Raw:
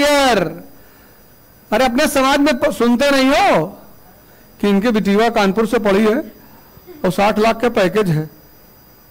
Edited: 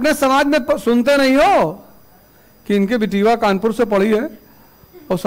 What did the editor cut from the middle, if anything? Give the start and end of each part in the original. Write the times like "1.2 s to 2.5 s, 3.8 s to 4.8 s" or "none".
none